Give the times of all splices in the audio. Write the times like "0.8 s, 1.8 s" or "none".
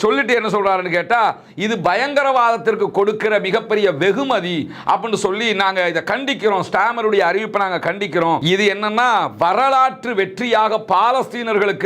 8.4 s